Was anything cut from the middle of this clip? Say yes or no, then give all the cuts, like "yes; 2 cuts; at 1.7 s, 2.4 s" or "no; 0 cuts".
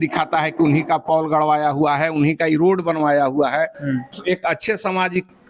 no; 0 cuts